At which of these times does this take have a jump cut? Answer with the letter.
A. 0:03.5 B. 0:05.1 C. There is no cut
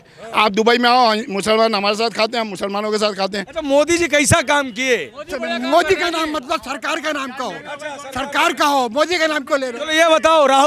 A